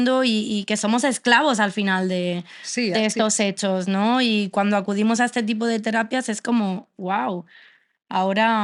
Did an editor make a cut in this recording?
no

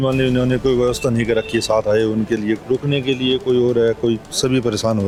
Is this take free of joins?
yes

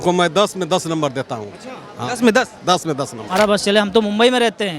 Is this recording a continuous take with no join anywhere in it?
no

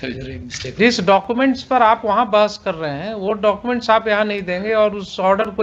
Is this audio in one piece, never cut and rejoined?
yes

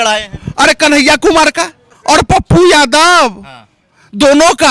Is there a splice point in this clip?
yes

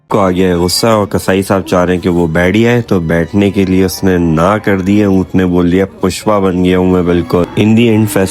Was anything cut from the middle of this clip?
no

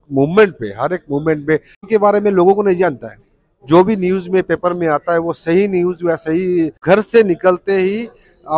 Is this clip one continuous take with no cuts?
no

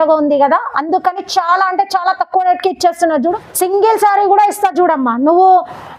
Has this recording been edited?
yes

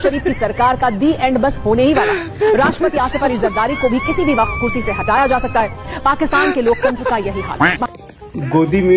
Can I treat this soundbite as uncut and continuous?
no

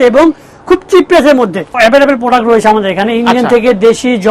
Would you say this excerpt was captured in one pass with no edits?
no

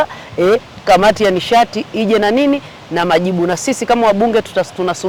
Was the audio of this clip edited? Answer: no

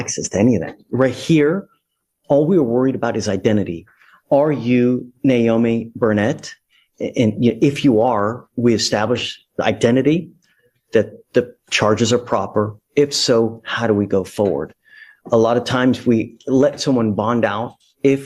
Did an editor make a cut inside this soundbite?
no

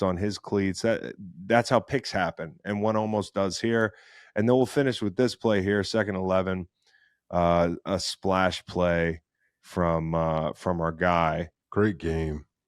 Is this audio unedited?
no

